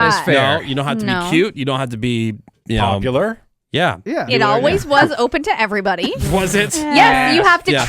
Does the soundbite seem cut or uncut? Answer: cut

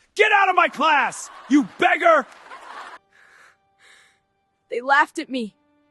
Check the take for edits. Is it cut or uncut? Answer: cut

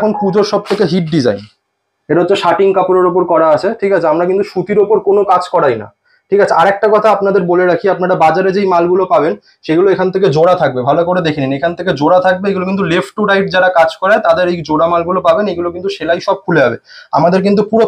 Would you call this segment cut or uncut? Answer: uncut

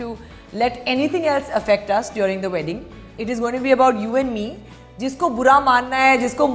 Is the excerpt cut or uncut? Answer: uncut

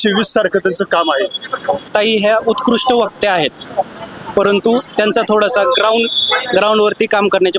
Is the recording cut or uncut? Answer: cut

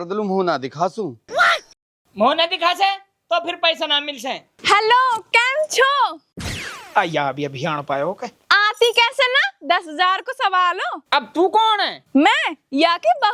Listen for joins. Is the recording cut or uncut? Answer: cut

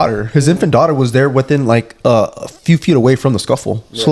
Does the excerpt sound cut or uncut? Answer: uncut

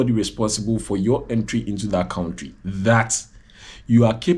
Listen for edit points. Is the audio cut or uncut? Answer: uncut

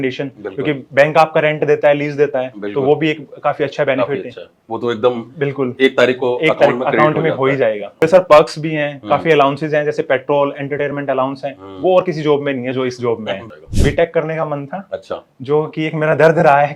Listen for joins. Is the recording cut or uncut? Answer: cut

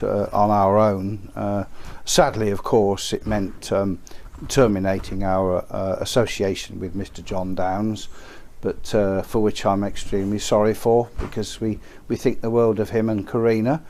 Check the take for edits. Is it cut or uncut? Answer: cut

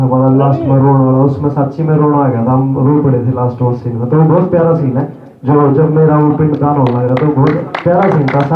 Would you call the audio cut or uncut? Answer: uncut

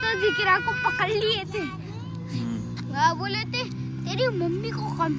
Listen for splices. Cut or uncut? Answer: uncut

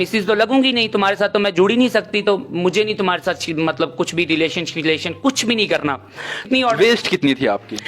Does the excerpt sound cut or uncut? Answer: cut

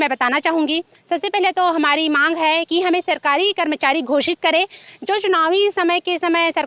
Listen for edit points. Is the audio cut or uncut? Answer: uncut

